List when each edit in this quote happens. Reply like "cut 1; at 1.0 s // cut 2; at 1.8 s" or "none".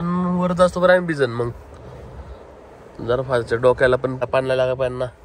cut 1; at 4.2 s